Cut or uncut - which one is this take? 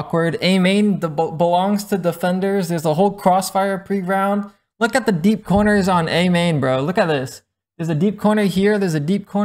uncut